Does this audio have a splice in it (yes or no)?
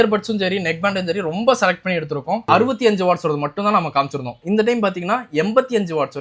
yes